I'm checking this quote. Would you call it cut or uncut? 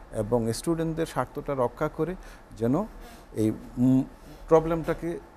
uncut